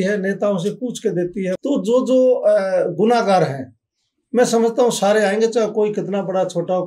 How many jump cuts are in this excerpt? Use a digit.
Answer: 1